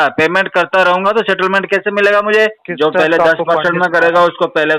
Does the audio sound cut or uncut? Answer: cut